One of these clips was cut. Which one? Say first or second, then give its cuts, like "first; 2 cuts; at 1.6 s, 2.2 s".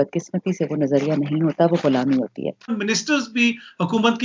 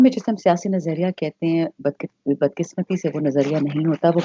first; 1 cut; at 2.7 s